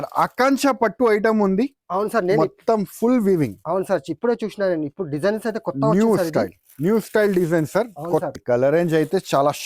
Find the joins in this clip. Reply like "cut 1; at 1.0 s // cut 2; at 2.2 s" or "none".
cut 1; at 8.3 s